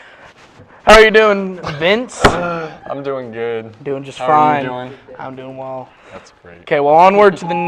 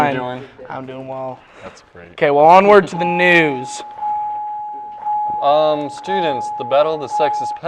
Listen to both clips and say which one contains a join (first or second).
second